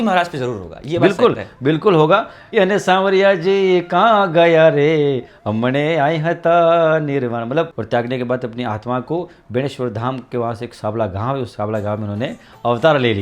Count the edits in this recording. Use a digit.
2